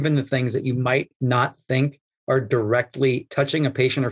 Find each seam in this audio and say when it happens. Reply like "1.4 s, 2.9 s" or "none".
1.1 s, 3.2 s